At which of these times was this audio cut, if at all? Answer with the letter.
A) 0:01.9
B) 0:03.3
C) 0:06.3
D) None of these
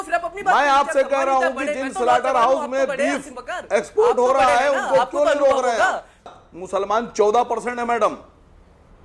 C